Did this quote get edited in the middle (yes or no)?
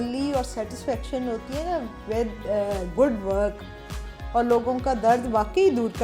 no